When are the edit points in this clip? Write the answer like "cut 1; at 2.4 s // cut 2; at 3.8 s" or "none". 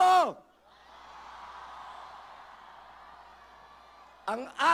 none

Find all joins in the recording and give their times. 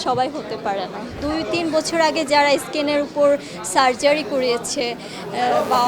cut 1; at 1.2 s

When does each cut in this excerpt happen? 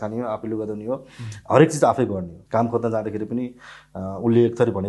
cut 1; at 2.4 s

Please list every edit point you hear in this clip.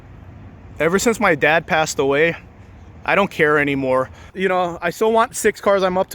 cut 1; at 4.3 s

